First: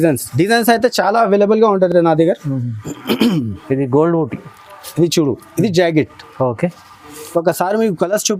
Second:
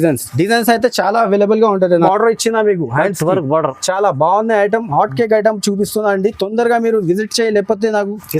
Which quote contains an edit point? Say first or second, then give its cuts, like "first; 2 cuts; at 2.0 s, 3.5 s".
second; 1 cut; at 1.9 s